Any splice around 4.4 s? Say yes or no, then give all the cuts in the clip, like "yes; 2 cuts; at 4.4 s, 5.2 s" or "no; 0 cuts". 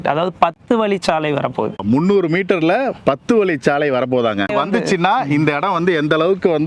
no; 0 cuts